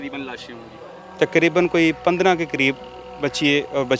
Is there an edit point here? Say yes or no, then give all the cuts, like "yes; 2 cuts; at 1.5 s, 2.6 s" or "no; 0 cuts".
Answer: no; 0 cuts